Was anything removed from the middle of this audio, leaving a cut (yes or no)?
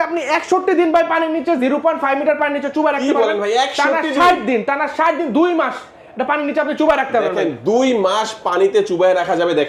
no